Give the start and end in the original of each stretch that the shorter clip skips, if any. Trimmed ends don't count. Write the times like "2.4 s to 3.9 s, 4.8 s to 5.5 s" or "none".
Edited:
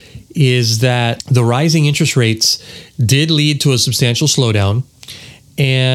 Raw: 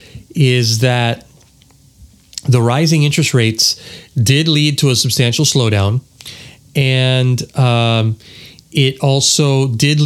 1.2 s to 2.4 s